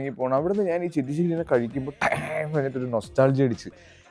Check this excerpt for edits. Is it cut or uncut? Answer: uncut